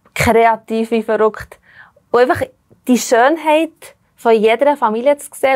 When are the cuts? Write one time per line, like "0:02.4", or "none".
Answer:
none